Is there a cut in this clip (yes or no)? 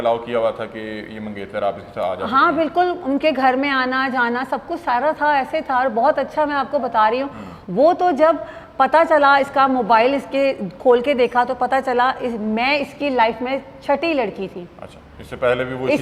no